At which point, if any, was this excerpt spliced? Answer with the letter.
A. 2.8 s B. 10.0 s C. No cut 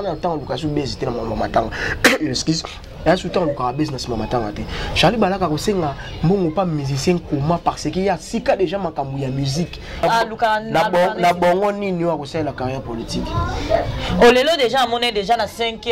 B